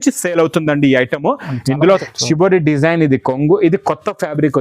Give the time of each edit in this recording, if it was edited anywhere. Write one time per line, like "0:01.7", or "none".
0:02.0